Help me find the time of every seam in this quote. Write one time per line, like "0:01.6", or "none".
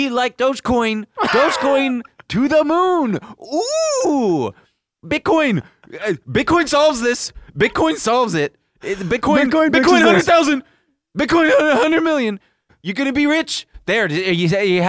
none

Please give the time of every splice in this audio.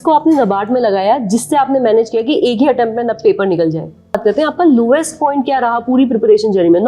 0:04.2

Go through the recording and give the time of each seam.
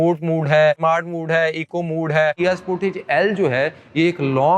0:00.8
0:02.4

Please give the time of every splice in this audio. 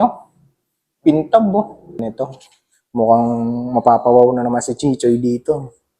0:02.0

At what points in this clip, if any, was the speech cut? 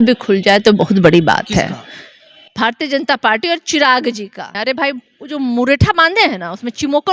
0:04.5

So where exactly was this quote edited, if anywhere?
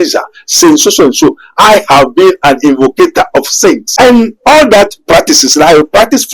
0:03.9

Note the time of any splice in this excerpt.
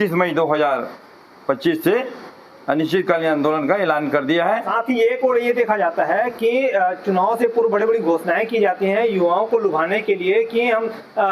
0:04.7

